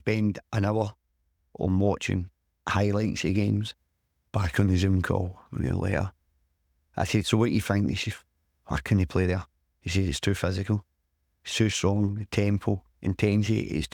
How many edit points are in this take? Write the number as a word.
zero